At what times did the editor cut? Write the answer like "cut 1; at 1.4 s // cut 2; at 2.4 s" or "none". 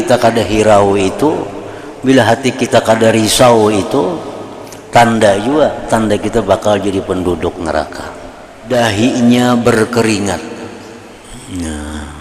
cut 1; at 8.6 s

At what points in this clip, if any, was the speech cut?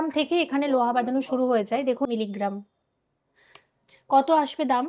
cut 1; at 2.1 s

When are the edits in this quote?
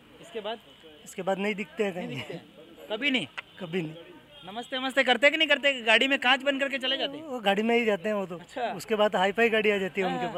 none

